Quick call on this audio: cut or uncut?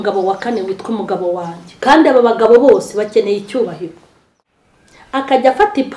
cut